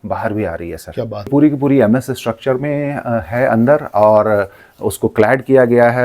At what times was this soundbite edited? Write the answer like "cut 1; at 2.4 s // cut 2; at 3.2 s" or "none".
cut 1; at 1.3 s